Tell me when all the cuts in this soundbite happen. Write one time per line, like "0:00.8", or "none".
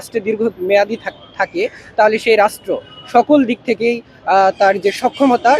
none